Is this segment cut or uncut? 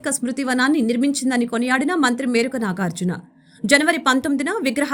uncut